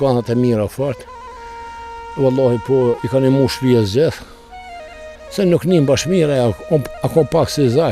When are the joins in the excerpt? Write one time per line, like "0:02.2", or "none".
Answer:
none